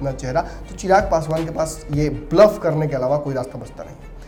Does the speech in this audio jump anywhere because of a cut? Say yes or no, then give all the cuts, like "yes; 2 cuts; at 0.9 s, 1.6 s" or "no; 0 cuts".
no; 0 cuts